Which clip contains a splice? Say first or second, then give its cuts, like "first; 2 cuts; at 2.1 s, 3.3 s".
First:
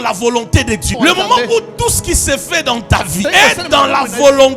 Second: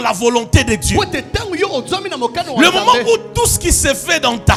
first; 2 cuts; at 0.9 s, 3.2 s